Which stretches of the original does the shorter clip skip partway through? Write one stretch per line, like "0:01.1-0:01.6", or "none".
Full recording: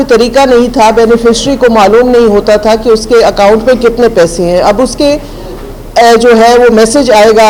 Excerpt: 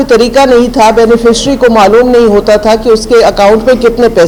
none